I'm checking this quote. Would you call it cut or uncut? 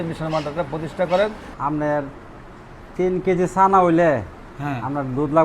cut